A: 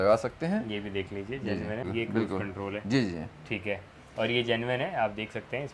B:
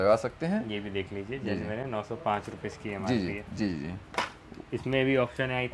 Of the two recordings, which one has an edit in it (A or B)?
A